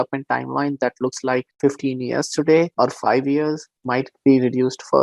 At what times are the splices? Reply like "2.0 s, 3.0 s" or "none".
1.5 s, 2.7 s, 3.7 s